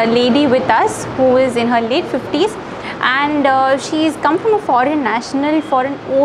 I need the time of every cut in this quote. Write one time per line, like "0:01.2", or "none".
none